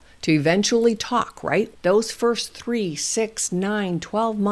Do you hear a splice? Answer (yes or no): yes